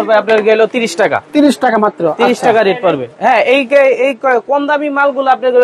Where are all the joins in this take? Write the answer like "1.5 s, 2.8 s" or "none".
none